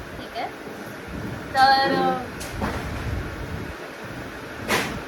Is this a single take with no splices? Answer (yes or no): yes